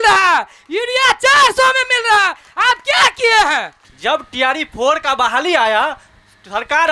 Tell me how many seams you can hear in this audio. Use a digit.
1